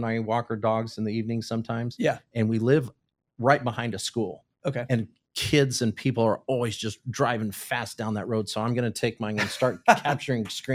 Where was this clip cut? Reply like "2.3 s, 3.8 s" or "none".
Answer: none